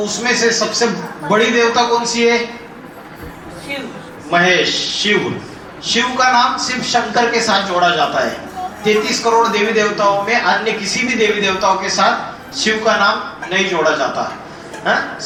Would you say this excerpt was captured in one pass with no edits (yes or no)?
yes